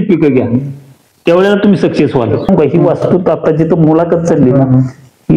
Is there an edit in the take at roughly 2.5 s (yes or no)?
yes